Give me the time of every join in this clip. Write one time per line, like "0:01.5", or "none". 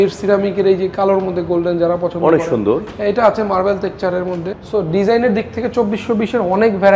0:04.6